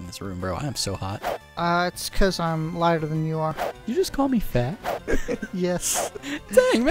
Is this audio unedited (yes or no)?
no